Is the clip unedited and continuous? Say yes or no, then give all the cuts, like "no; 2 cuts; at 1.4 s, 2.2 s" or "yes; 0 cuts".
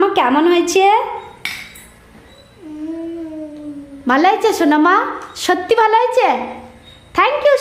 yes; 0 cuts